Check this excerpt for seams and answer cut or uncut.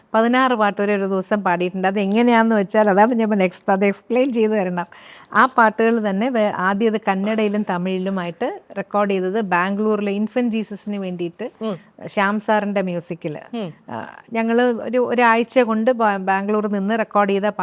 uncut